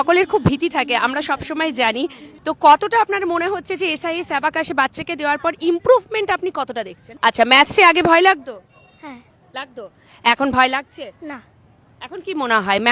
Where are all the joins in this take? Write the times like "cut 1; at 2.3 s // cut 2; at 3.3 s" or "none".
cut 1; at 2.3 s // cut 2; at 7.1 s